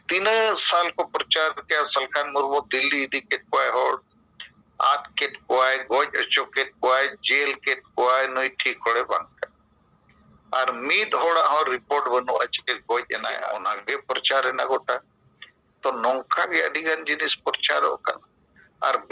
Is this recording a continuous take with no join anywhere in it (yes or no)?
no